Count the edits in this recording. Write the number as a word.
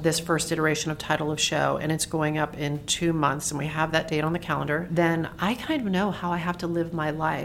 one